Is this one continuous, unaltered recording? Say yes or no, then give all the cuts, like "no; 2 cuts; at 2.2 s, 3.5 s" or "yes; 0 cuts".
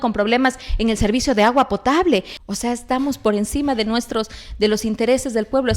no; 1 cut; at 2.4 s